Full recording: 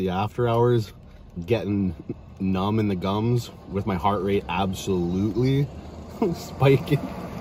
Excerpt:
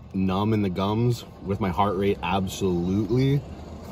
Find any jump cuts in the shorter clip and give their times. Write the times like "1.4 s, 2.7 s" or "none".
none